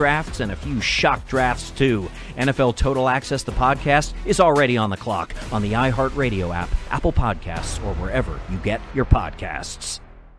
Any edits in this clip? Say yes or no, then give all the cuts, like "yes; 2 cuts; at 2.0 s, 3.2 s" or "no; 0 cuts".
no; 0 cuts